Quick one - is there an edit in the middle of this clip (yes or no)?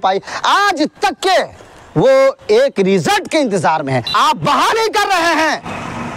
yes